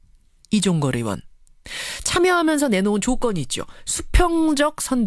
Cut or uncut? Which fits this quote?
cut